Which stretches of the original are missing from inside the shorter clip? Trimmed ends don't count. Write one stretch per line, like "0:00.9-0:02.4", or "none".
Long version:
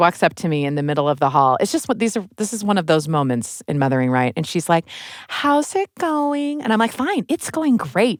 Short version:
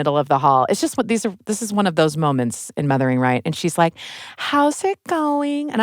none